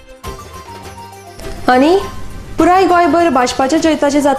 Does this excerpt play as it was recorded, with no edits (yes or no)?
no